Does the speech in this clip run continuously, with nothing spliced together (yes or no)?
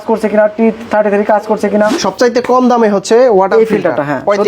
no